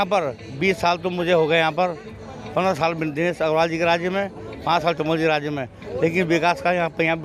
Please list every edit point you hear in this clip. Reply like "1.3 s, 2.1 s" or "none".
none

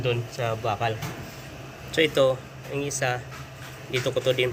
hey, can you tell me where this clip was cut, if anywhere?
none

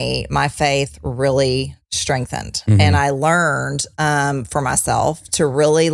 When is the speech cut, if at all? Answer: none

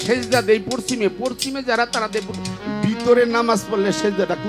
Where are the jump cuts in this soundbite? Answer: none

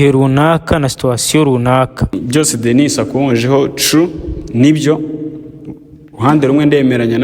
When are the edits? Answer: 2.2 s

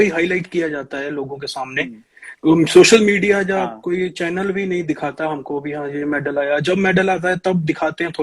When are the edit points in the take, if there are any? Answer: none

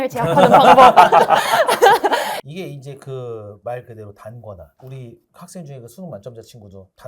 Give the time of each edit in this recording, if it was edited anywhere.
2.4 s

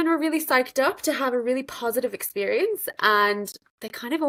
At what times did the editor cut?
none

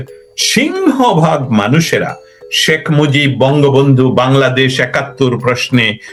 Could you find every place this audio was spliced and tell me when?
none

